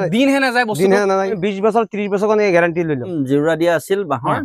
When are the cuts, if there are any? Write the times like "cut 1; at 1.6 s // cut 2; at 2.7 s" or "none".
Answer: cut 1; at 1.4 s // cut 2; at 3.1 s